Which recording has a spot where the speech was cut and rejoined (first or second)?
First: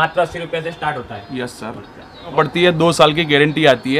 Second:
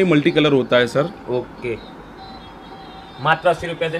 first